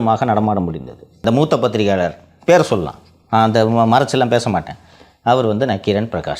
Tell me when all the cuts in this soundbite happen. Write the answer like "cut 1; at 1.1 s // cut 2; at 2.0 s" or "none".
cut 1; at 1.2 s